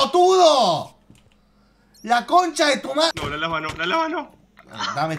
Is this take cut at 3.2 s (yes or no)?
yes